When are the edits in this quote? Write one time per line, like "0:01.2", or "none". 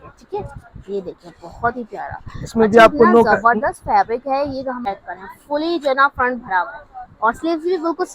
0:04.8